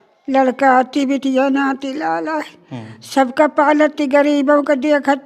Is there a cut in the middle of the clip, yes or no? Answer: no